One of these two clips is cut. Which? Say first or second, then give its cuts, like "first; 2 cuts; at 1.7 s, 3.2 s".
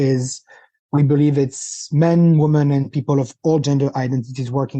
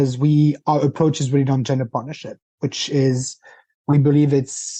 first; 1 cut; at 3.6 s